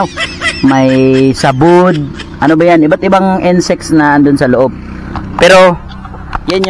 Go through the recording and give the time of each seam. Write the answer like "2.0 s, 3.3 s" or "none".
none